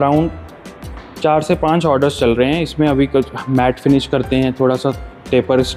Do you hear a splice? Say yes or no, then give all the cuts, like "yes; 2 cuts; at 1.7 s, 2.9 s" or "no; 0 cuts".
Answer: no; 0 cuts